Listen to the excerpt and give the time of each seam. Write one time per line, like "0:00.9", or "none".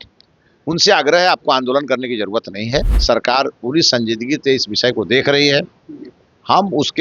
0:02.9